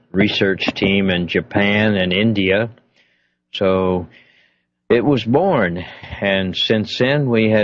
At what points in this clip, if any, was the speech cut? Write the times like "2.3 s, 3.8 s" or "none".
6.2 s

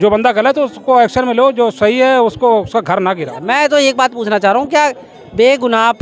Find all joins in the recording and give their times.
3.4 s

